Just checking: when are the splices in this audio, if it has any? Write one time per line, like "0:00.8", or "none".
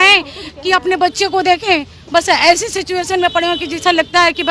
none